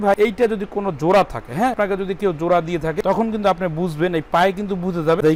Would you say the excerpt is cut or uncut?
uncut